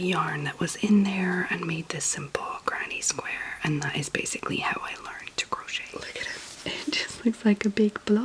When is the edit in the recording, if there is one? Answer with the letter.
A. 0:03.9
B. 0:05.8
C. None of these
B